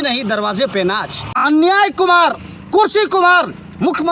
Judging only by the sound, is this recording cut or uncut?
cut